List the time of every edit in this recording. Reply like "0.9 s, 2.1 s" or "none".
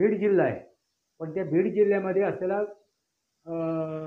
none

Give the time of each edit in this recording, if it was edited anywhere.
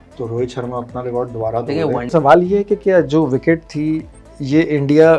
2.1 s

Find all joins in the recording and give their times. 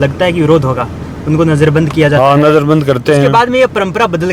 none

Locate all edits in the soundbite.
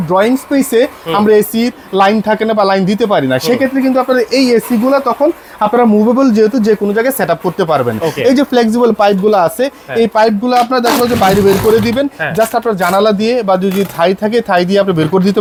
none

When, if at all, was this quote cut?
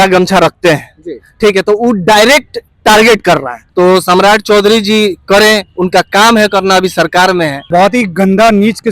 3.6 s, 7.7 s

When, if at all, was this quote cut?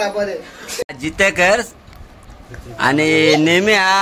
0.9 s

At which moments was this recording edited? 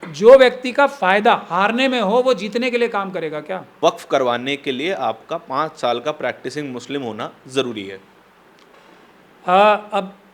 3.8 s

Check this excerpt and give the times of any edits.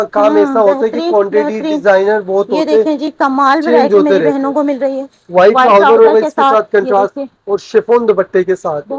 none

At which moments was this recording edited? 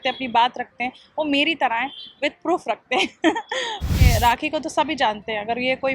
4.1 s

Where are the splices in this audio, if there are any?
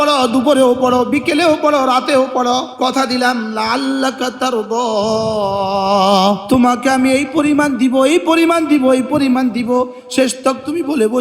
2.7 s, 6.4 s

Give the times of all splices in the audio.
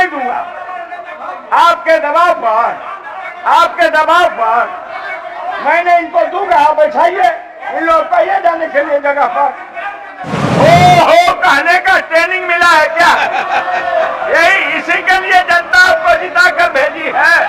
10.4 s

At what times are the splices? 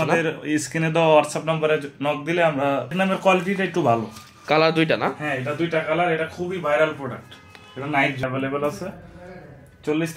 2.9 s, 8.2 s

